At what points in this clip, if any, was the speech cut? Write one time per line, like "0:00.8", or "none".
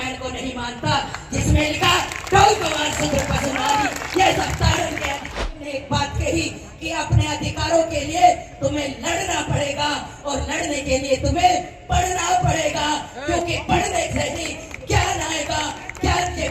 0:05.5